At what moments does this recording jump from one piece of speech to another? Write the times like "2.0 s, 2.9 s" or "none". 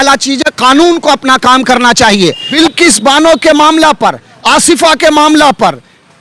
2.4 s